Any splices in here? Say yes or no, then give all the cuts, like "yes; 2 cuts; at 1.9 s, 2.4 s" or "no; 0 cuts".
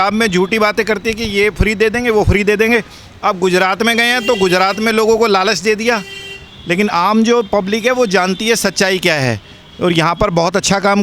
no; 0 cuts